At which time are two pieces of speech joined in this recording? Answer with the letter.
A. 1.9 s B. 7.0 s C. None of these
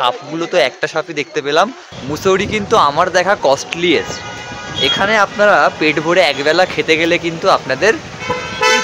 A